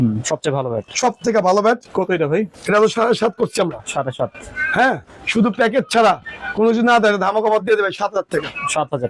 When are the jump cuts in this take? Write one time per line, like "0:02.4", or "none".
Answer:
0:01.9